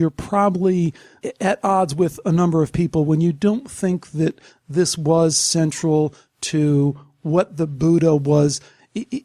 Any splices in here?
no; 0 cuts

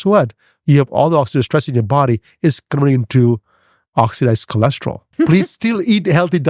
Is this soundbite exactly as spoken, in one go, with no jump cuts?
no; 1 cut; at 5.0 s

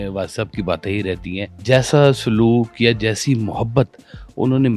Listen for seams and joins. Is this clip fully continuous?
no; 1 cut; at 1.5 s

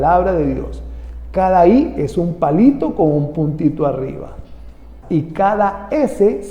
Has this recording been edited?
yes; 1 cut; at 4.9 s

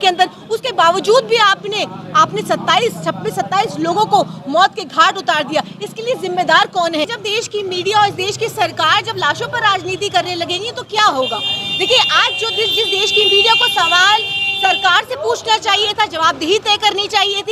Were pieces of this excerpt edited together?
yes; 1 cut; at 7.2 s

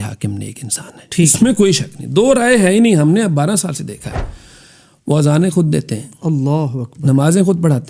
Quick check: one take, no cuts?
yes; 0 cuts

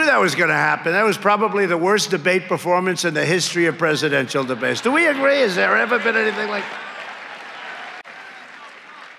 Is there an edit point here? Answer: yes; 1 cut; at 8.1 s

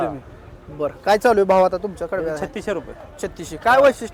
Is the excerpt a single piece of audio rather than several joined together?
yes; 0 cuts

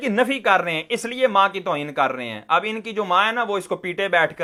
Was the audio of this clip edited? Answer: no; 0 cuts

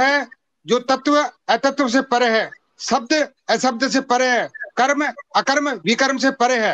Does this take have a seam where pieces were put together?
no; 0 cuts

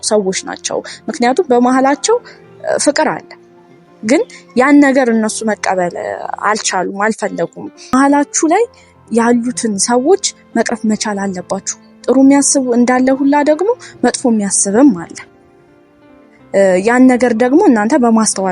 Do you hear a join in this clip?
yes; 1 cut; at 7.9 s

